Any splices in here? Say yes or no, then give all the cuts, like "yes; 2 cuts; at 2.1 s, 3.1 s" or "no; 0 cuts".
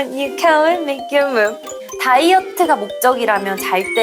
yes; 1 cut; at 1.7 s